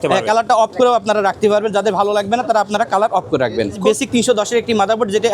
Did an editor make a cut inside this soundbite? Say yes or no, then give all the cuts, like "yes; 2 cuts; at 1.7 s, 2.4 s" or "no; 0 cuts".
yes; 1 cut; at 3.8 s